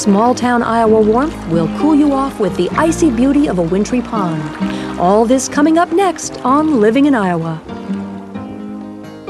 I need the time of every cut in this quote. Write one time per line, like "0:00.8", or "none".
none